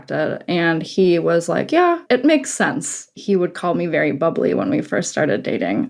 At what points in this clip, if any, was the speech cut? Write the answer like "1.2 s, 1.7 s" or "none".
2.0 s, 3.2 s